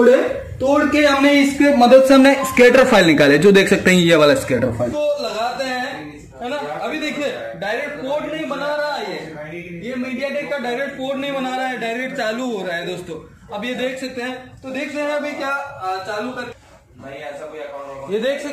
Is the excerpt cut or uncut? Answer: cut